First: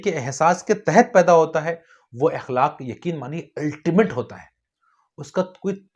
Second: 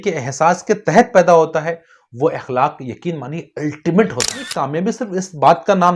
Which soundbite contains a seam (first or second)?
second